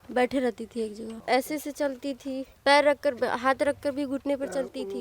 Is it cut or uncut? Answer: cut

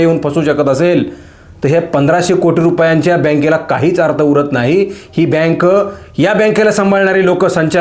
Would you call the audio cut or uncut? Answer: uncut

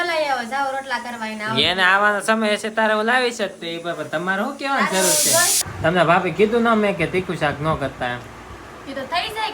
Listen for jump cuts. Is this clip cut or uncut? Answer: cut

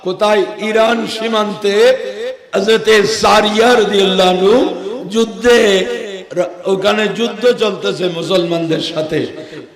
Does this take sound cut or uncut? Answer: uncut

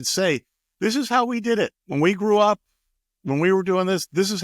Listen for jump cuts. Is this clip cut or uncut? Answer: cut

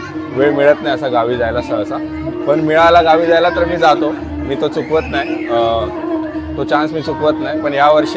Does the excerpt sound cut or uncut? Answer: uncut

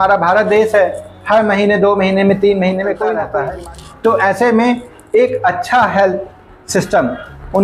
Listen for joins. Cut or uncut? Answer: cut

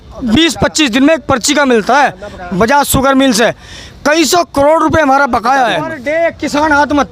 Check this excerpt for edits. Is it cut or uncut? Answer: cut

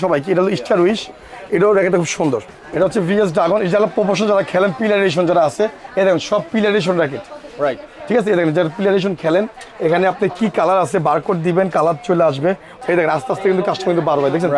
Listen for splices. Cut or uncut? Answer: cut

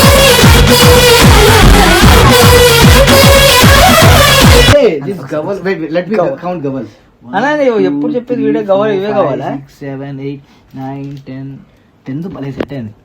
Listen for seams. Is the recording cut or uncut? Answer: cut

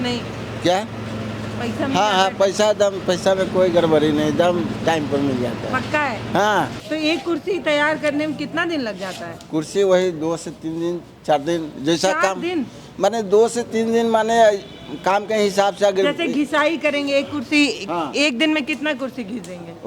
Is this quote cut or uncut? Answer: uncut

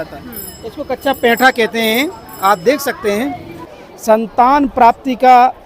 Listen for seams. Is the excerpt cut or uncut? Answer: cut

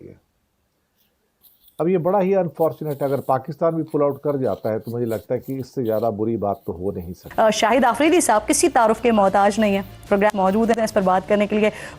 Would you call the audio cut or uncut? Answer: cut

